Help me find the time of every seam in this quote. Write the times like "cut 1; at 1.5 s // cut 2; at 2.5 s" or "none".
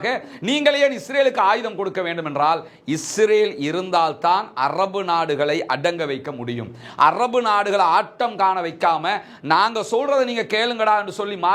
none